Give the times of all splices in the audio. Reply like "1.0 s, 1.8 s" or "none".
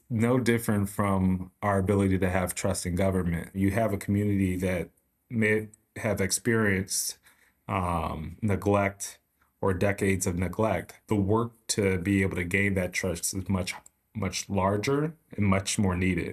3.6 s, 10.9 s